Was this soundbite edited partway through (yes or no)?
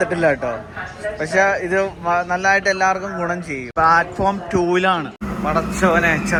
no